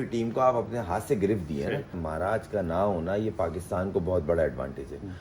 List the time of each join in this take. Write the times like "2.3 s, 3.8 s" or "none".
2.0 s